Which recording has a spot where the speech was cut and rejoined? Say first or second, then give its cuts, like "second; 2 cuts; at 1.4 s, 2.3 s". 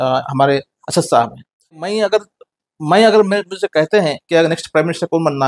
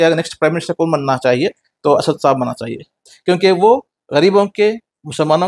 first; 1 cut; at 1.8 s